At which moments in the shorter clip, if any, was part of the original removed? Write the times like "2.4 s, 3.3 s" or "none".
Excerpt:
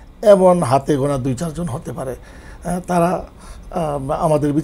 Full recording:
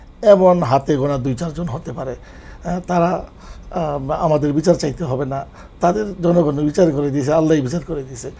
none